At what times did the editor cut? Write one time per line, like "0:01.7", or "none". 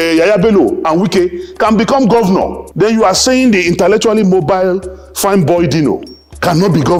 none